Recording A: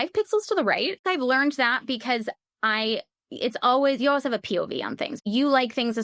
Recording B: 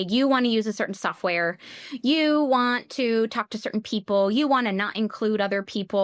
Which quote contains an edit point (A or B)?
A